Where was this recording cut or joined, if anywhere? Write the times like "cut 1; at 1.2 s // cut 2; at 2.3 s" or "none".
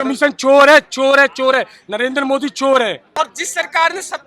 cut 1; at 3.2 s